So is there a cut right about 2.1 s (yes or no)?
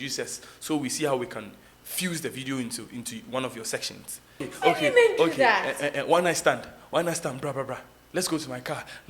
no